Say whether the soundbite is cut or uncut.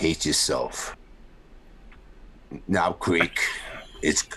cut